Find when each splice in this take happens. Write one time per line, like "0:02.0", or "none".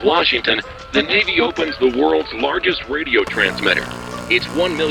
none